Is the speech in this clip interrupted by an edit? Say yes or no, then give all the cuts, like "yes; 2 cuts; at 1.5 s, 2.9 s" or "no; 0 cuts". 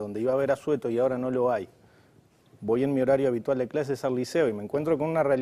yes; 1 cut; at 3.7 s